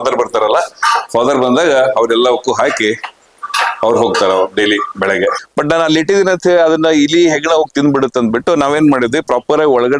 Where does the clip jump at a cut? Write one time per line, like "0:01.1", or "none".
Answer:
0:05.4